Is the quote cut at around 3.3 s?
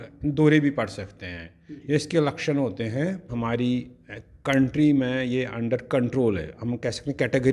yes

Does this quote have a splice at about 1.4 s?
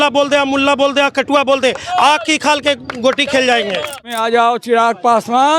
no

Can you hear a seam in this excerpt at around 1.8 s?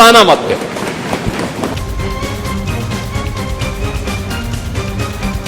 no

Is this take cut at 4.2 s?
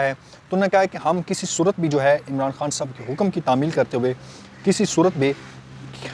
no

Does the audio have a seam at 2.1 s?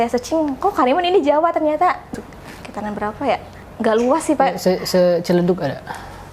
yes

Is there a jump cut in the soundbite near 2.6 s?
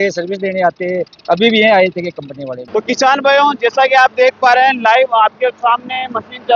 yes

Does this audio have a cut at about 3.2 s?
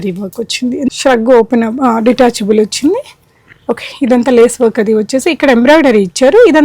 no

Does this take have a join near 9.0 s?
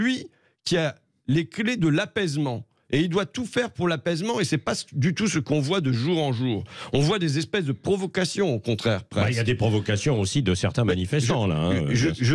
no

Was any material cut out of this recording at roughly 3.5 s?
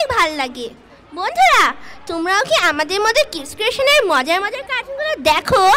no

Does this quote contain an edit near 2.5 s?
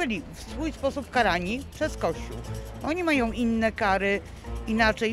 no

